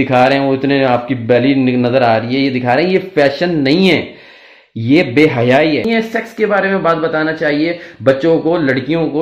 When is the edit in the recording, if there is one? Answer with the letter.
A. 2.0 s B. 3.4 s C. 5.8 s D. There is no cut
C